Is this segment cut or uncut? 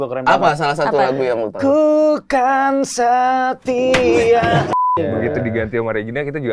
cut